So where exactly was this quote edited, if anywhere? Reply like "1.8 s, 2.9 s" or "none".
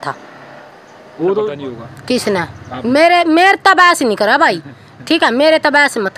1.7 s